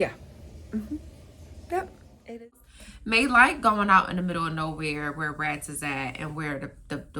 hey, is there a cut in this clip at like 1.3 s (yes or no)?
no